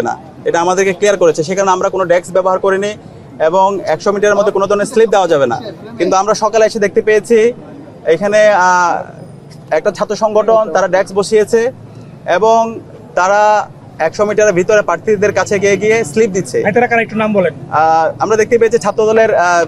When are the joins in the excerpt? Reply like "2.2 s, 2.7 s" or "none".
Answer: none